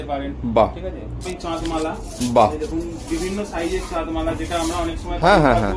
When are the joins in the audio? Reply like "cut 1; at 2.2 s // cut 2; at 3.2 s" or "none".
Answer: cut 1; at 1.3 s

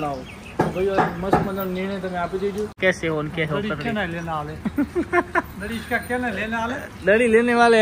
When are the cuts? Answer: cut 1; at 2.7 s

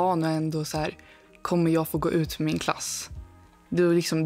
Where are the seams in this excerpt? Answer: none

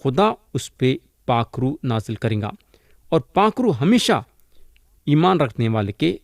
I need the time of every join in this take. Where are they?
none

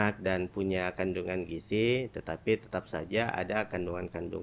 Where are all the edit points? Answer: none

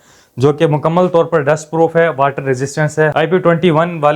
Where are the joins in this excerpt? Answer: cut 1; at 3.1 s

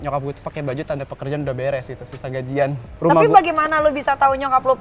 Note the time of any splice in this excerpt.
cut 1; at 2.9 s

